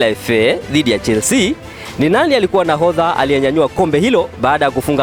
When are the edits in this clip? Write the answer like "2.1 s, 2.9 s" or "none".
none

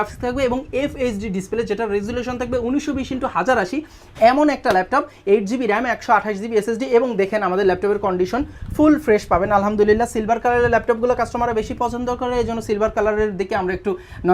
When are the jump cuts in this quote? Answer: none

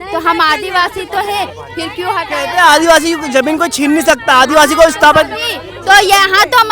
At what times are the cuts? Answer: none

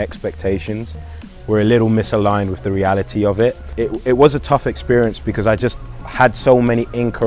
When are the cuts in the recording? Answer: 3.7 s

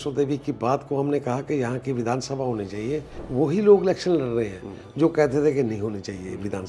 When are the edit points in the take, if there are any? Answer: 3.2 s

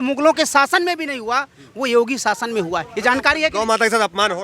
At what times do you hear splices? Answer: none

